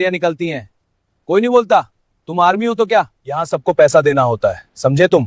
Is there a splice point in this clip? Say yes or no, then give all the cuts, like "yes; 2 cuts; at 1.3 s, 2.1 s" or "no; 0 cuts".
yes; 1 cut; at 3.2 s